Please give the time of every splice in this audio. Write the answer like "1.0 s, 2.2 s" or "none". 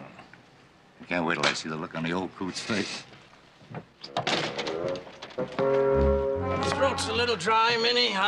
none